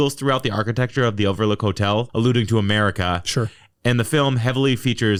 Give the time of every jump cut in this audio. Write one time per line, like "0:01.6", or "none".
none